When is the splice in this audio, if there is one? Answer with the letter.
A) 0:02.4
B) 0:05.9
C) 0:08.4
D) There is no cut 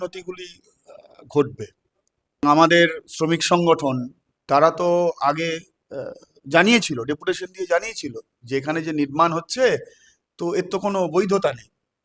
A